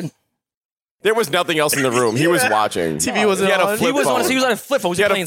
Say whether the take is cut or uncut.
cut